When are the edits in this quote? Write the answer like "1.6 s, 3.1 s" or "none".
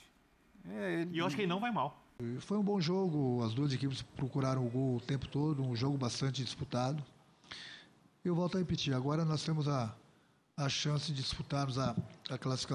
2.2 s